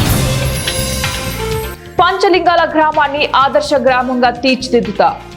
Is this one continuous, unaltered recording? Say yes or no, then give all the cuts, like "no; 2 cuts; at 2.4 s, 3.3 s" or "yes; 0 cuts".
no; 1 cut; at 1.7 s